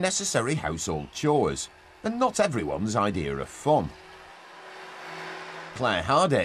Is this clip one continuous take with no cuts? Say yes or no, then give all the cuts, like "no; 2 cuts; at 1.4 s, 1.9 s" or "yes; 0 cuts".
yes; 0 cuts